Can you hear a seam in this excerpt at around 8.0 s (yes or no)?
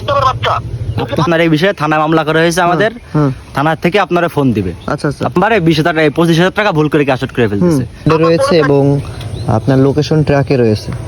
yes